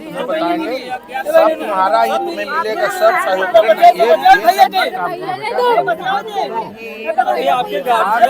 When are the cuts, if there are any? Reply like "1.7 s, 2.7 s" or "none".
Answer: none